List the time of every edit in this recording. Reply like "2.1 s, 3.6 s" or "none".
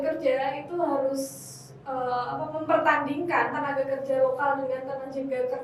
none